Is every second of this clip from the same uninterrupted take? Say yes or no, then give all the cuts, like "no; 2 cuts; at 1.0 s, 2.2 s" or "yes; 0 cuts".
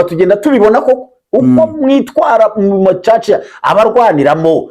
yes; 0 cuts